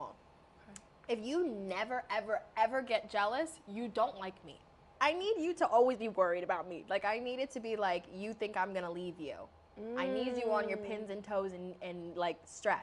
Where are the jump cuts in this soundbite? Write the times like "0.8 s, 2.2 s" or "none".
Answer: 4.9 s